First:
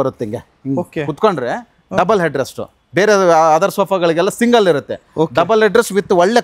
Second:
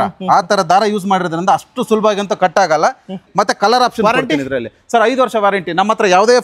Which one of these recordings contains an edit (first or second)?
second